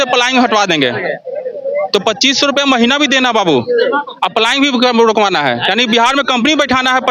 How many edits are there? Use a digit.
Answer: 0